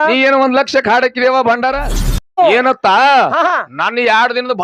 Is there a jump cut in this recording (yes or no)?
yes